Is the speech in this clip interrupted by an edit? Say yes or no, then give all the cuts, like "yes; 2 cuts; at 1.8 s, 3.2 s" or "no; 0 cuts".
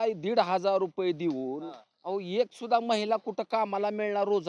no; 0 cuts